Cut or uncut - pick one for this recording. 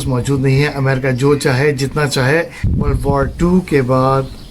cut